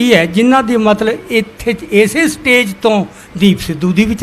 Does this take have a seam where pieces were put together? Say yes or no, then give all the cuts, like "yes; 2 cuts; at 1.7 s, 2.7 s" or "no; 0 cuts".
no; 0 cuts